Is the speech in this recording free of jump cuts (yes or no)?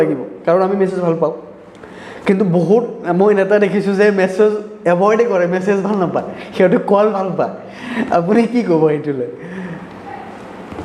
yes